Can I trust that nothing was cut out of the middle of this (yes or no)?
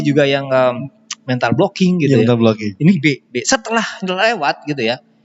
yes